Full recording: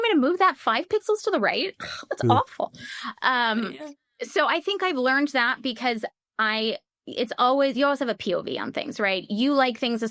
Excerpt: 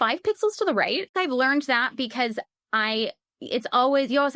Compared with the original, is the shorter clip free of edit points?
no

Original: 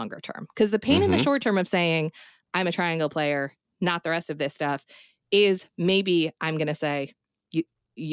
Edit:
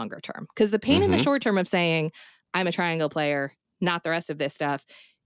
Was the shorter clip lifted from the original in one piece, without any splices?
yes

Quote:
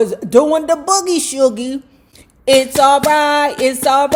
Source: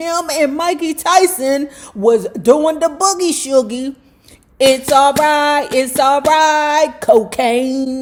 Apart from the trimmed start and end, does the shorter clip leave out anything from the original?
no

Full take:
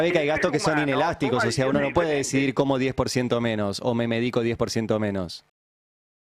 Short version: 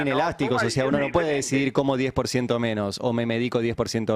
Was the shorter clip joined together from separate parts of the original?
no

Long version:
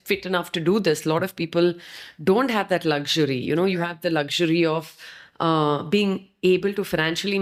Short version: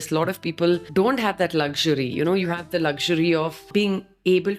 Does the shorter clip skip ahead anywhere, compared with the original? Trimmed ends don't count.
yes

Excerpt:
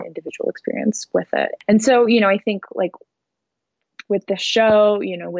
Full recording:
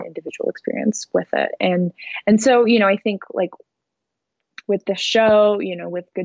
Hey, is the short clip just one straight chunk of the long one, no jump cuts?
no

